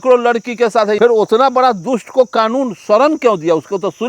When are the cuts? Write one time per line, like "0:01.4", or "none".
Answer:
0:01.0